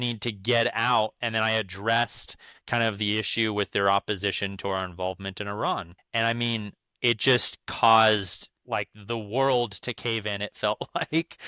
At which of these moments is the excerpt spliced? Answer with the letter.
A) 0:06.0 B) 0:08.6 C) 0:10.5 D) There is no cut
A